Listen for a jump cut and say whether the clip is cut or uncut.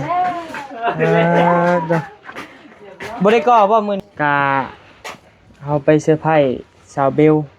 cut